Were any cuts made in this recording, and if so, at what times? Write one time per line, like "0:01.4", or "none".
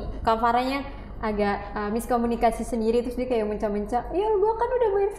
none